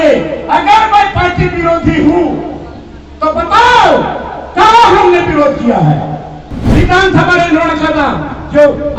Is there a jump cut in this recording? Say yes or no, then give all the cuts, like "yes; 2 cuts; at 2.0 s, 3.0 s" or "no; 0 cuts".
yes; 1 cut; at 6.5 s